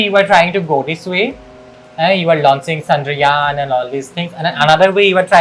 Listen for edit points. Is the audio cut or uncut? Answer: uncut